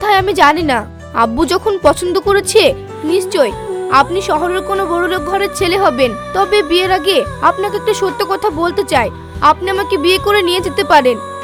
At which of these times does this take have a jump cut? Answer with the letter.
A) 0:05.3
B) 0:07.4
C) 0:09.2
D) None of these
D